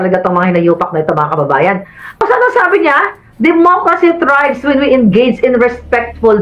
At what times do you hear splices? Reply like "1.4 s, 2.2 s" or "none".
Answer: 2.2 s